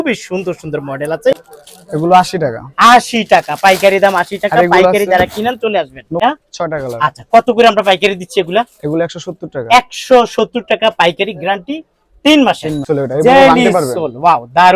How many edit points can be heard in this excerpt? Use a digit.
3